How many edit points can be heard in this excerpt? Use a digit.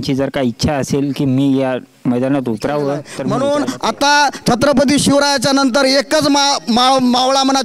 1